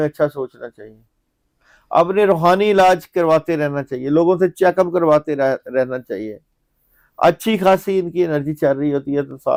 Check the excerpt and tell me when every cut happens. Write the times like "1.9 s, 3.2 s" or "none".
none